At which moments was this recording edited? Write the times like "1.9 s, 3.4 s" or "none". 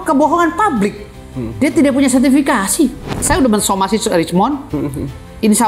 3.2 s